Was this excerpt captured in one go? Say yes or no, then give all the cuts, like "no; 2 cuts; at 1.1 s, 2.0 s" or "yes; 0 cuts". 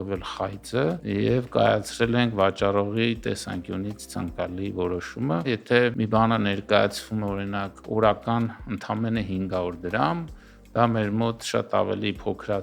no; 2 cuts; at 1.0 s, 5.8 s